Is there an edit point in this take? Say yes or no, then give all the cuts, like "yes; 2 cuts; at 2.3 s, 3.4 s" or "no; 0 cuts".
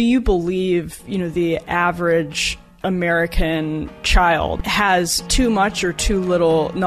yes; 1 cut; at 4.6 s